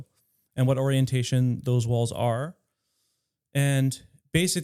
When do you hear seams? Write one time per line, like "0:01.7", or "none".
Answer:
none